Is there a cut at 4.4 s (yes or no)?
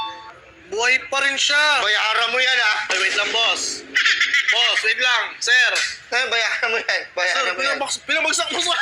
no